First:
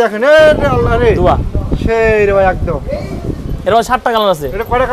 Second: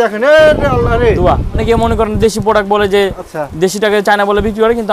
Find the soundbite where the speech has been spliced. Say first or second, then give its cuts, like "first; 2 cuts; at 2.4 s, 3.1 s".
second; 1 cut; at 1.6 s